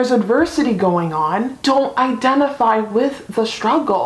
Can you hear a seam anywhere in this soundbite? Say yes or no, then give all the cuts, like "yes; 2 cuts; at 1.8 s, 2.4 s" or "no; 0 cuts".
no; 0 cuts